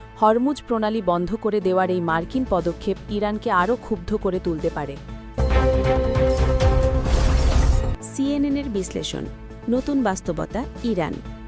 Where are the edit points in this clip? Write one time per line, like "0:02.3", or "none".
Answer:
0:05.2
0:07.8